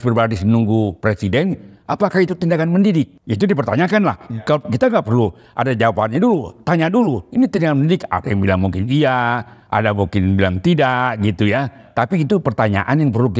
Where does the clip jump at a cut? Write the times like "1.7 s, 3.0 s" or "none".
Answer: 3.2 s